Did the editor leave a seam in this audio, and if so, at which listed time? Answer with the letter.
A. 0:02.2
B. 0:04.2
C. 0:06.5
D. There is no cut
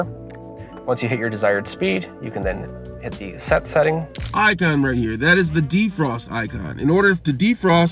B